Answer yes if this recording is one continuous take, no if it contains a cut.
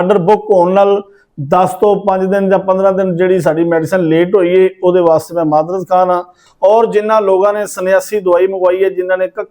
no